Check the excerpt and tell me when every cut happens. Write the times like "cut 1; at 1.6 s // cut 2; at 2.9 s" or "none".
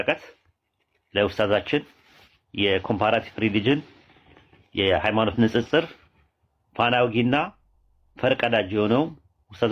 none